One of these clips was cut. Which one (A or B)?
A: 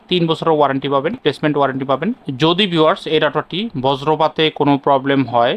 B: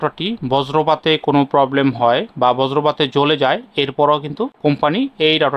A